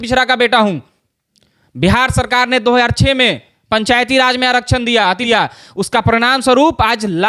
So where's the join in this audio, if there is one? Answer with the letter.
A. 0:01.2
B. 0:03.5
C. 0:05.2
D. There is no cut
C